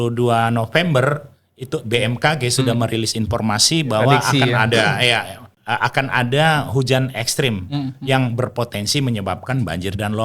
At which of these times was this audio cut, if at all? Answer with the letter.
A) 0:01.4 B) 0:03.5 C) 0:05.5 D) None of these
C